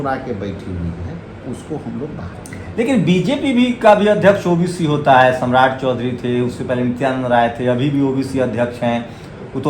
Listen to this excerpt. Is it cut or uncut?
uncut